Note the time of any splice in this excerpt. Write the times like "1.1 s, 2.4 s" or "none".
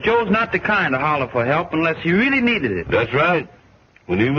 3.5 s